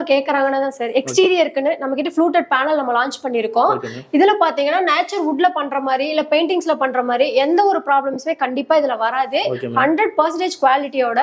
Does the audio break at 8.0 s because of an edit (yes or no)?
no